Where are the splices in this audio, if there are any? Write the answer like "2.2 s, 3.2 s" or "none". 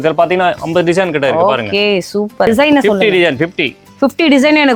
2.5 s